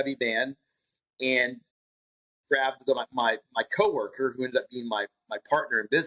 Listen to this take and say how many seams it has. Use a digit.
0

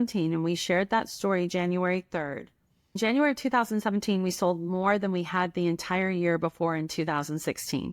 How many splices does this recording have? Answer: 1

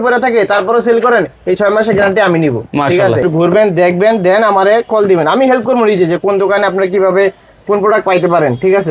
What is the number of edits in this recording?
1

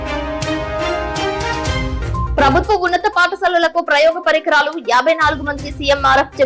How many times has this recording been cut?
1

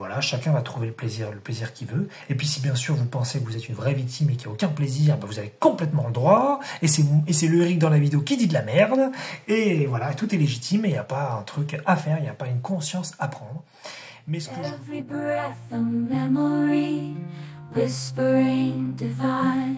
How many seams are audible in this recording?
1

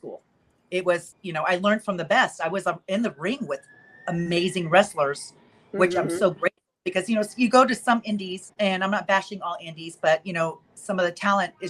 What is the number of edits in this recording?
2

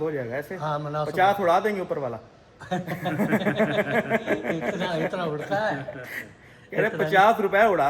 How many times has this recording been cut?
0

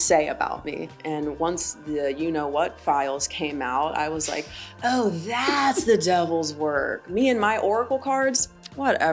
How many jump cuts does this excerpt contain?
1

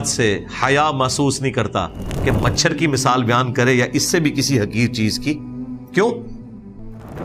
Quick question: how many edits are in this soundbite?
0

